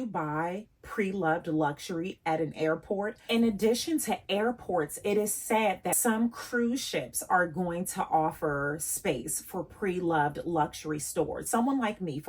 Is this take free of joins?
no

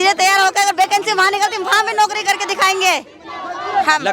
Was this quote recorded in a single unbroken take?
yes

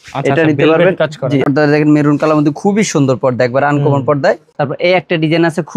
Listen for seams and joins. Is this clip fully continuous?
no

